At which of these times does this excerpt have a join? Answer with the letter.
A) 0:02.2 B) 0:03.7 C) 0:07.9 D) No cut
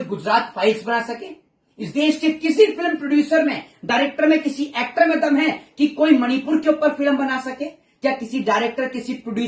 D